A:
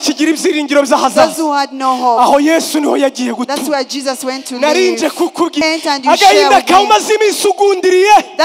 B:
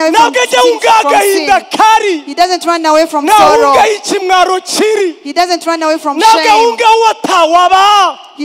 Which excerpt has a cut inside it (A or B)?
A